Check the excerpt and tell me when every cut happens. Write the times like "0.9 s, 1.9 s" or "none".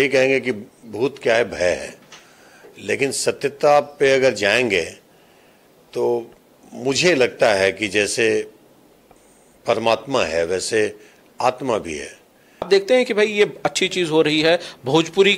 12.7 s

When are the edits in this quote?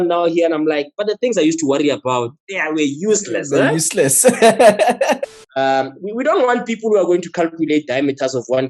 5.2 s

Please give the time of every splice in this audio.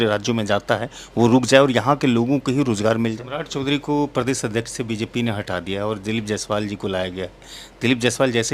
3.3 s

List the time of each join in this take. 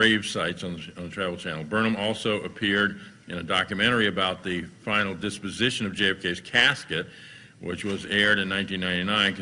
3.6 s

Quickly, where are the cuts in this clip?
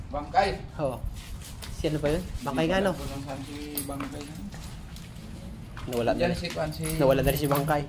none

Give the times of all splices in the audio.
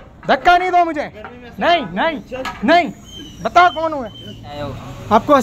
4.5 s

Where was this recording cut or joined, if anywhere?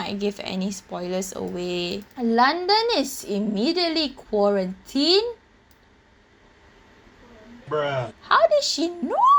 2.1 s

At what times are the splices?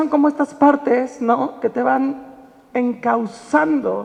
none

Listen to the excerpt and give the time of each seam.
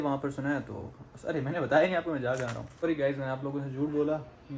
2.6 s

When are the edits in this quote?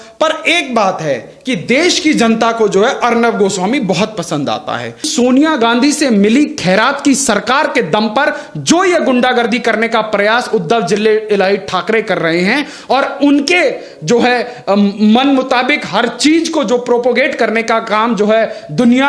5.1 s

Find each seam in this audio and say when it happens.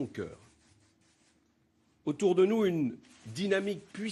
none

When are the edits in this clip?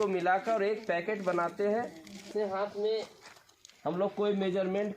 2.3 s

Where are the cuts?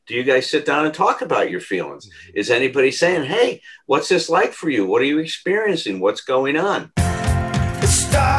7.0 s

